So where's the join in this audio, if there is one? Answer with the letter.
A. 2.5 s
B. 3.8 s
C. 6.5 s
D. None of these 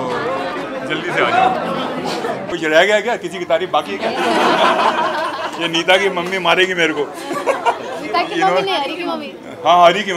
A